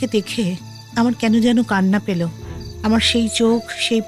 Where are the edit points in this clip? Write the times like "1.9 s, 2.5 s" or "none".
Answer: none